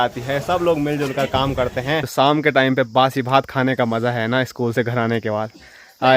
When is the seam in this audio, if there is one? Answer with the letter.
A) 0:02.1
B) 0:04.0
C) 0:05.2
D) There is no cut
A